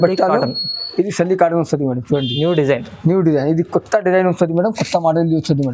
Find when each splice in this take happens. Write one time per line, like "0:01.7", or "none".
none